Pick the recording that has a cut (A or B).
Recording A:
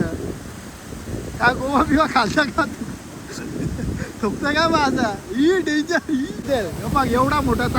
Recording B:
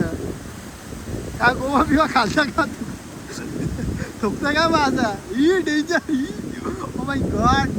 A